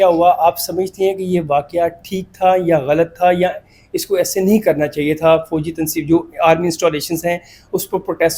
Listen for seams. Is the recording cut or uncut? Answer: uncut